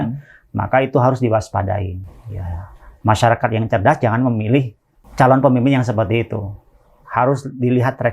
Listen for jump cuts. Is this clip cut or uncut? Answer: uncut